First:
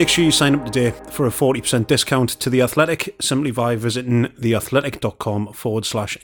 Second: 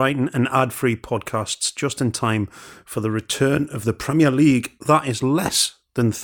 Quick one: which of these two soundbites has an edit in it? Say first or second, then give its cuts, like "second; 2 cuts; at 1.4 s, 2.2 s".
first; 1 cut; at 1.0 s